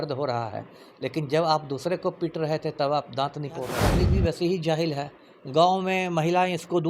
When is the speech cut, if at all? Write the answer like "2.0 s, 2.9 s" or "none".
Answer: 3.9 s